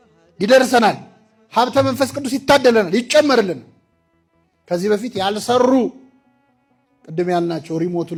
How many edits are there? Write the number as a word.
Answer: zero